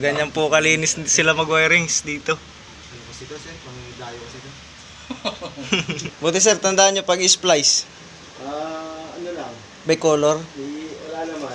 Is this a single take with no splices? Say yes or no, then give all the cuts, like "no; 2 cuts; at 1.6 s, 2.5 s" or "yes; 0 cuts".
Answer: no; 1 cut; at 6.1 s